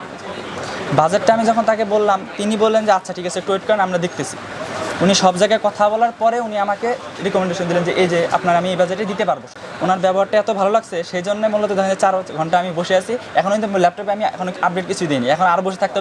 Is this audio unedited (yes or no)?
no